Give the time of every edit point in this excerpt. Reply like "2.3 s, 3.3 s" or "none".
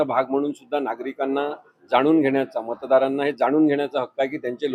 none